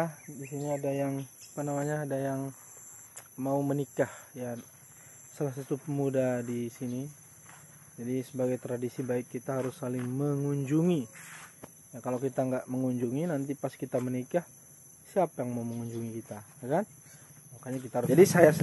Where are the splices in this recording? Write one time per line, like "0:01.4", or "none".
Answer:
0:17.6